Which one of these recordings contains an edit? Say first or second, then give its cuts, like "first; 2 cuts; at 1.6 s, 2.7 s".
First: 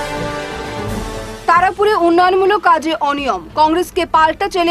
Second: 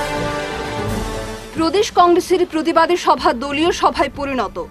first; 1 cut; at 0.9 s